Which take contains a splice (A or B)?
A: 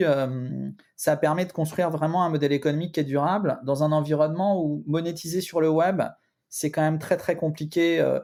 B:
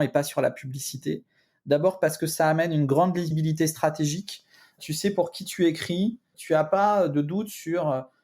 B